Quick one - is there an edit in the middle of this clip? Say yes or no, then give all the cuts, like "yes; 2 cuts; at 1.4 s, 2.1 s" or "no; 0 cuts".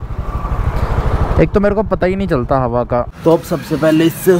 yes; 1 cut; at 3.1 s